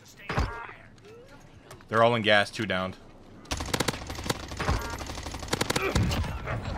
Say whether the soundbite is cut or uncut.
uncut